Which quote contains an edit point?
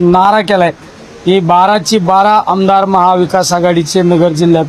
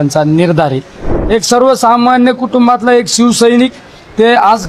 second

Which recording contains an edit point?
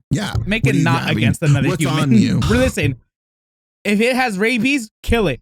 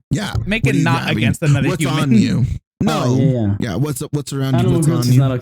first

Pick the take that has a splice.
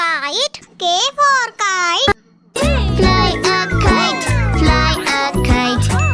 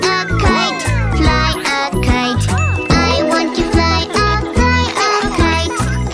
first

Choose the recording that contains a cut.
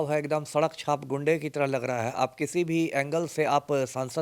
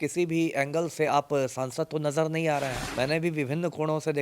second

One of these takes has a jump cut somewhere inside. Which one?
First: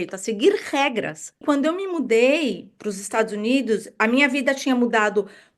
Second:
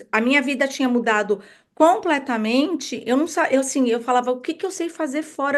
first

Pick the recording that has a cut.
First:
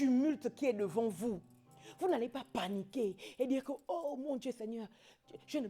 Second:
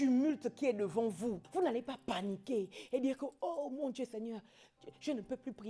second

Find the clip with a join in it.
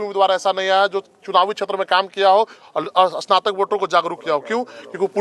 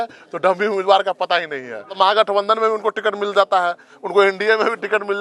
second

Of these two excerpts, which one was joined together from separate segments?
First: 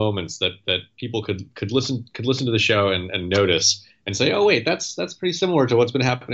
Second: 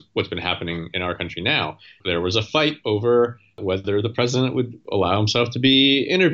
second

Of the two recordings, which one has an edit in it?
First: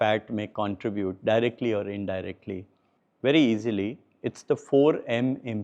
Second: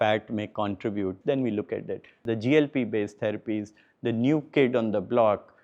second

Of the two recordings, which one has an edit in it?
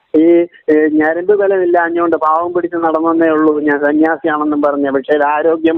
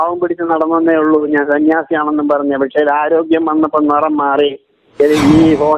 second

